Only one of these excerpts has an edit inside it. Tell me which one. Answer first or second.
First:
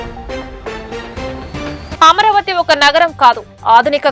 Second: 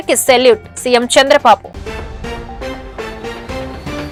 first